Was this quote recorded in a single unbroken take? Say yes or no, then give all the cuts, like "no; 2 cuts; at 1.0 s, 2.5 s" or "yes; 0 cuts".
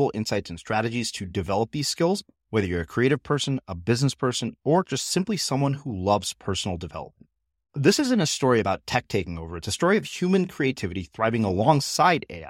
yes; 0 cuts